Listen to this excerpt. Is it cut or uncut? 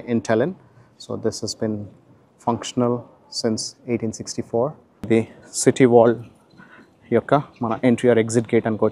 cut